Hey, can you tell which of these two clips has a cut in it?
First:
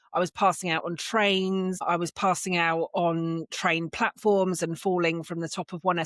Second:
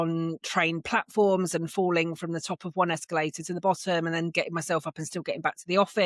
first; 1 cut; at 1.8 s

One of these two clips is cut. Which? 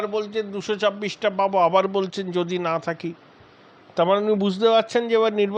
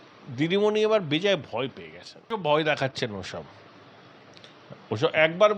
second; 1 cut; at 2.2 s

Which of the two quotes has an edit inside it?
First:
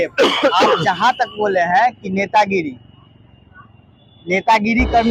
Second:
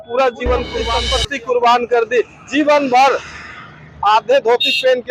second; 1 cut; at 1.0 s

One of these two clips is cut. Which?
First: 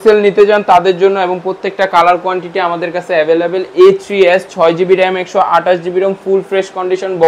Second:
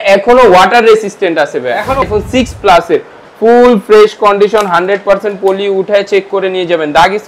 second; 1 cut; at 2.0 s

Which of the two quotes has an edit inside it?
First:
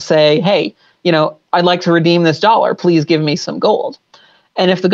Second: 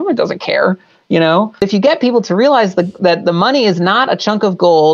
second; 1 cut; at 1.6 s

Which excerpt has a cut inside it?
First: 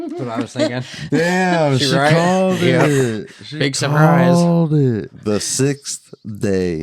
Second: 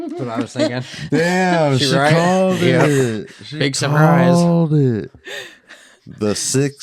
first; 1 cut; at 5.1 s

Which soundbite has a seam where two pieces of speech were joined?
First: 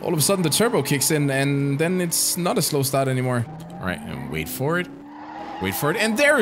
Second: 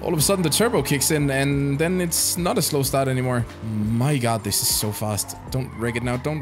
first; 1 cut; at 3.6 s

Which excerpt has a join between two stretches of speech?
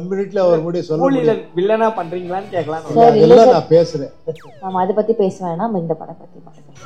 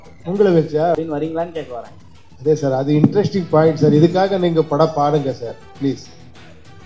second; 1 cut; at 1.0 s

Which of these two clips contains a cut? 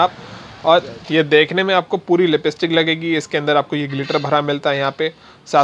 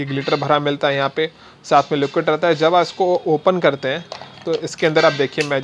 first; 1 cut; at 1.0 s

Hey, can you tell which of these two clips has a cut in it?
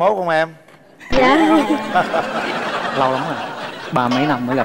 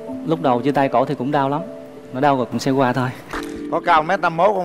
second; 1 cut; at 3.3 s

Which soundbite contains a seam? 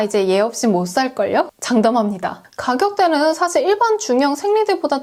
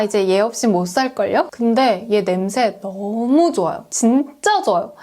second; 1 cut; at 1.5 s

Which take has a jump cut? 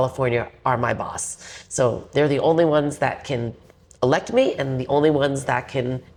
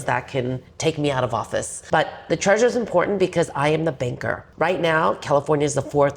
second; 2 cuts; at 1.7 s, 4.4 s

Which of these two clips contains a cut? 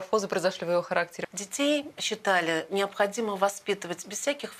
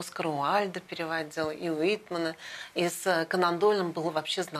first; 1 cut; at 1.2 s

